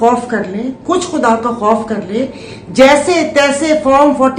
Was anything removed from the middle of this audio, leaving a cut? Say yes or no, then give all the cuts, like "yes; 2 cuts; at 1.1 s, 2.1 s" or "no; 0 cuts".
no; 0 cuts